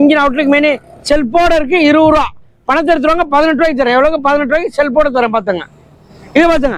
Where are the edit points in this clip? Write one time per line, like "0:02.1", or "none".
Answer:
none